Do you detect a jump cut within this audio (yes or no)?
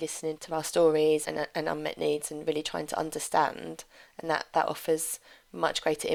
no